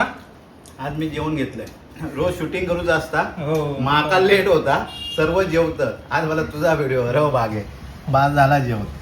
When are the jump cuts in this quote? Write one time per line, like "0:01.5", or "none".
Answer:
none